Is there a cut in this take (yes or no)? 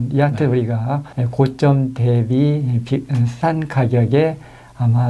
no